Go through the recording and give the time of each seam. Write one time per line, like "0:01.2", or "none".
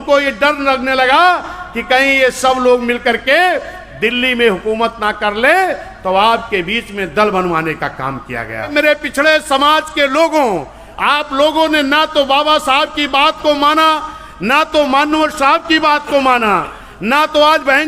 0:08.7